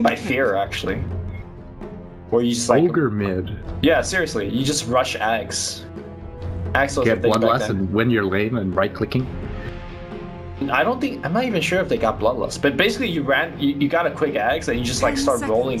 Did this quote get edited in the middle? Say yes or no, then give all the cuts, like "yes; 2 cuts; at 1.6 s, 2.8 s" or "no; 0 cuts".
yes; 1 cut; at 9.5 s